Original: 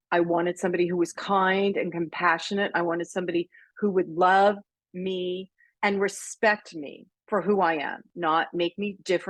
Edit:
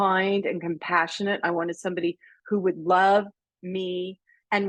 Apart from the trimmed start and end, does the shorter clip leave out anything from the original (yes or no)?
no